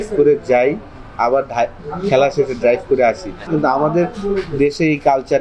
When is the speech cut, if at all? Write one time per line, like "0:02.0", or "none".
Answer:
0:03.4